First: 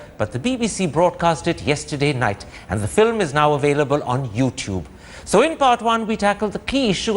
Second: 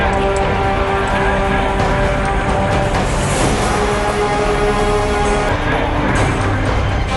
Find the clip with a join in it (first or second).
first